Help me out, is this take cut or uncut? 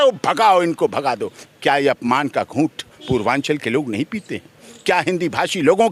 uncut